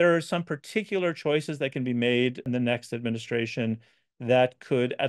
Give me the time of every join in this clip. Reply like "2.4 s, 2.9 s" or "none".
2.4 s